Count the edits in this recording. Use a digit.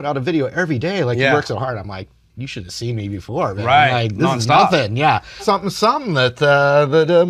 1